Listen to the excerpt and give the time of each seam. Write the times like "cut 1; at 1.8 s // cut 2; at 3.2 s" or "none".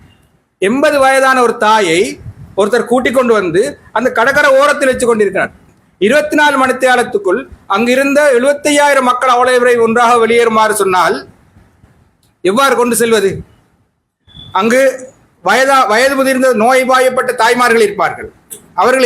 none

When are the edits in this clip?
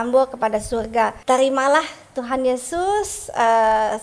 cut 1; at 1.2 s

